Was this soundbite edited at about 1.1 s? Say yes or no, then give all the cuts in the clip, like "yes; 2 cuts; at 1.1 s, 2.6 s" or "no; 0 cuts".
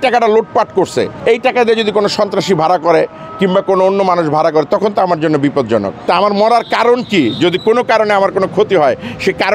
yes; 2 cuts; at 1.1 s, 6.1 s